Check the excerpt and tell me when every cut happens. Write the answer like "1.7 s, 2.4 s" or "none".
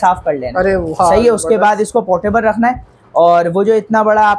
none